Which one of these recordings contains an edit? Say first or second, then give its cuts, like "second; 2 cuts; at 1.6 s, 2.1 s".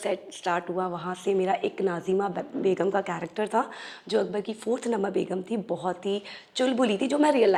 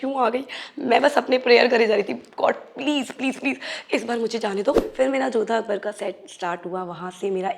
second; 1 cut; at 4.9 s